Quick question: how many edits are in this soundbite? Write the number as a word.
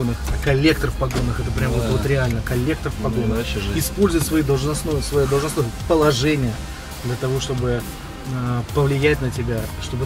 zero